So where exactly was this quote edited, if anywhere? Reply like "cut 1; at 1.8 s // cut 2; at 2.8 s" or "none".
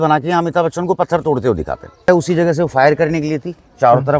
cut 1; at 2.1 s